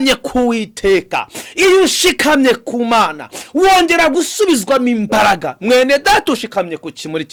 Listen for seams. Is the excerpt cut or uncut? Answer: uncut